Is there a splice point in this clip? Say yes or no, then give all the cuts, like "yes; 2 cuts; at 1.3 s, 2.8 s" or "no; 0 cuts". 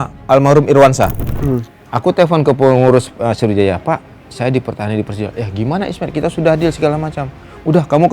yes; 1 cut; at 1.3 s